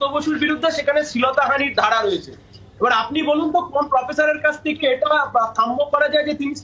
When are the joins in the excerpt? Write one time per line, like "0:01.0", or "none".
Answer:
none